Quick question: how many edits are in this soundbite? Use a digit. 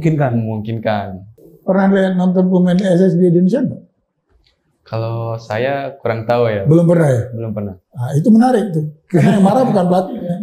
1